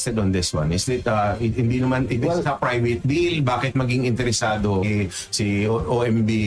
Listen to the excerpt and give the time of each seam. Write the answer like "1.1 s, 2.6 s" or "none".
4.9 s

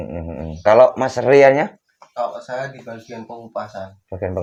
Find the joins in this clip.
none

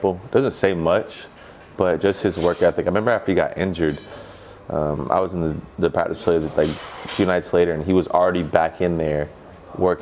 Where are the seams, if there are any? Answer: none

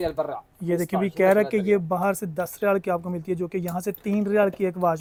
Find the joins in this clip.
none

